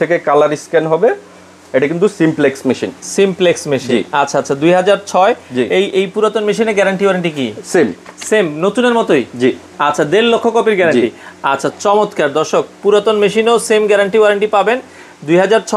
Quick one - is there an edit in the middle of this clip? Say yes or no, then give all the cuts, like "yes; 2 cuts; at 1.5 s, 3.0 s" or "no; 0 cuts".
no; 0 cuts